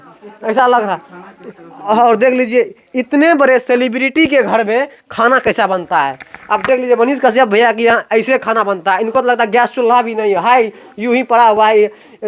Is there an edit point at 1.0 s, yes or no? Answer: no